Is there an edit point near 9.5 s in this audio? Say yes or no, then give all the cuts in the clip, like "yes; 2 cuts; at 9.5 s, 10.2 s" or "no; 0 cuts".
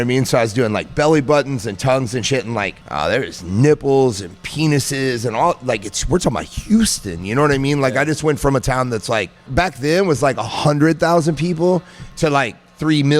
yes; 3 cuts; at 2.8 s, 9.5 s, 12.0 s